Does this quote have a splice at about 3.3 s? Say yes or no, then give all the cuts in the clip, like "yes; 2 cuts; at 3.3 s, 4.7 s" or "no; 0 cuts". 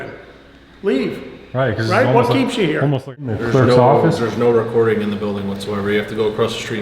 yes; 1 cut; at 3.3 s